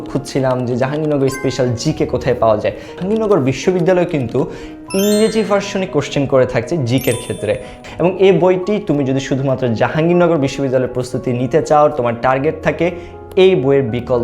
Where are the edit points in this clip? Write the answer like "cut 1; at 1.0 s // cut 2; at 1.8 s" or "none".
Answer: cut 1; at 2.9 s // cut 2; at 7.8 s